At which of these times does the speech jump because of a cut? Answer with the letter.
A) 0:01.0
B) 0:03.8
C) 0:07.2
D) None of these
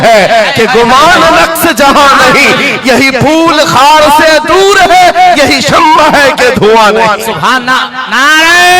D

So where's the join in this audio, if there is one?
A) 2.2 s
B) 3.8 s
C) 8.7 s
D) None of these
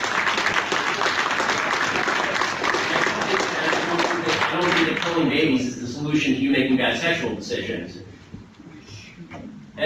A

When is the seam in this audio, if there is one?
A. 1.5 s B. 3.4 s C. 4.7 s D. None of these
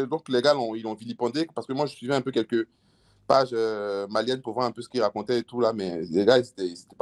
D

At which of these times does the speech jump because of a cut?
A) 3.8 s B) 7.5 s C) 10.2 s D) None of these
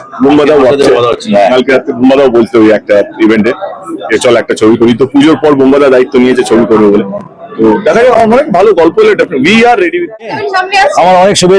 C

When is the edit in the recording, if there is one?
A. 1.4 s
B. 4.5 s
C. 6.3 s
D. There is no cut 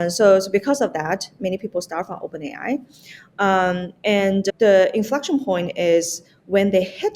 B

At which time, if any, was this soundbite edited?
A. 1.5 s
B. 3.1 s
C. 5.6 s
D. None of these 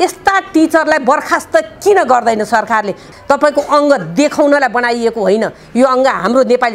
B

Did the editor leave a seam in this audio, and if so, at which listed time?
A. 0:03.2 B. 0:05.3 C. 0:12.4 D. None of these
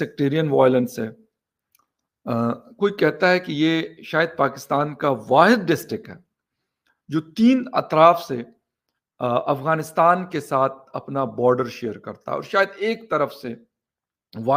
D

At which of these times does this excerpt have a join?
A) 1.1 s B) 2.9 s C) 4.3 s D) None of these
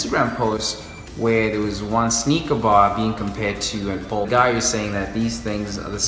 C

